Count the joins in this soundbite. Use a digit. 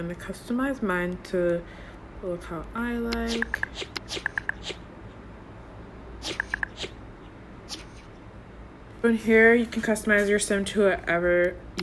1